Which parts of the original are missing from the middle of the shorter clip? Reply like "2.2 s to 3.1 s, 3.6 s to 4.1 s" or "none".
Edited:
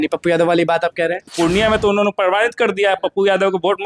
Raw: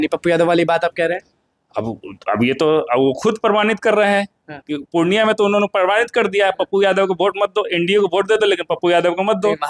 1.3 s to 4.8 s